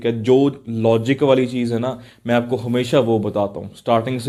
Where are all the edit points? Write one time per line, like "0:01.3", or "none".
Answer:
none